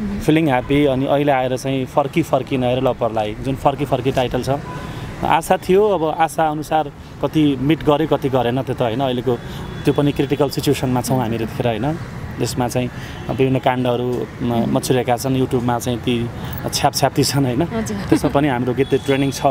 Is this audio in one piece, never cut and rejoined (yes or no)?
yes